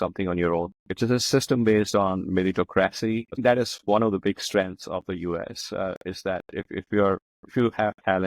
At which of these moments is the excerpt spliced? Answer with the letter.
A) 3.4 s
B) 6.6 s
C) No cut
A